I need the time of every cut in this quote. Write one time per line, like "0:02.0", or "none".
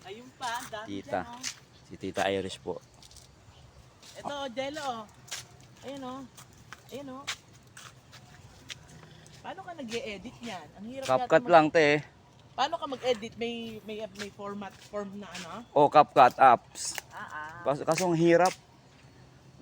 0:09.2

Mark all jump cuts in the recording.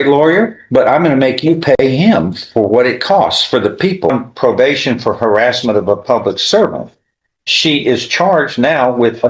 0:04.1

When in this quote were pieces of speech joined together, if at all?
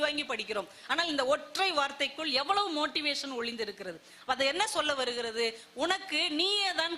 none

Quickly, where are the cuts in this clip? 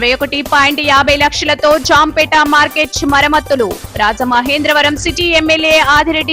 none

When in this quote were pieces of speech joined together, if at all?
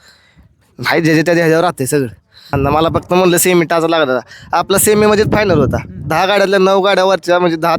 0:02.3

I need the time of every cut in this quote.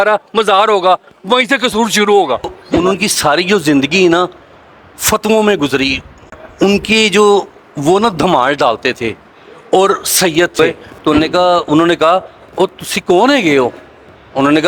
0:02.6
0:10.6

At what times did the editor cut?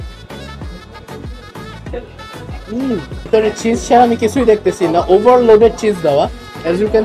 0:03.3

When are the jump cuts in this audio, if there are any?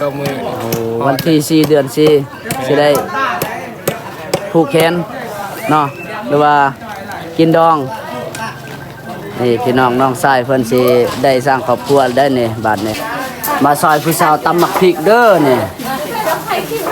0:13.0

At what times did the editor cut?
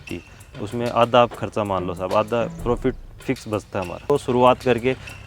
0:04.1

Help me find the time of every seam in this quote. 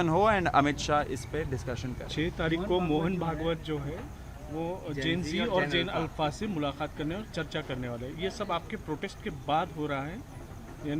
none

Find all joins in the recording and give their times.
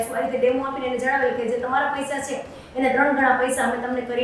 none

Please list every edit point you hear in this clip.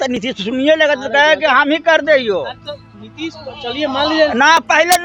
none

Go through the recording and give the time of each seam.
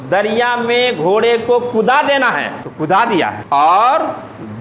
0:02.6
0:03.4

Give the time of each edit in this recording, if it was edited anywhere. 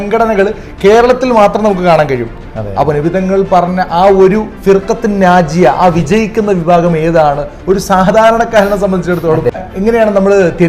0:09.6

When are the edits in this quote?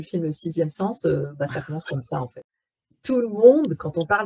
0:02.3

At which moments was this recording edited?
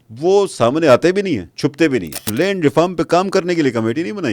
0:01.5
0:02.2

